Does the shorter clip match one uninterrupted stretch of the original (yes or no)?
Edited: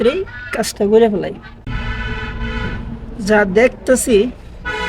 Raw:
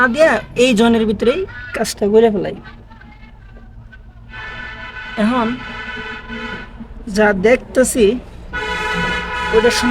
no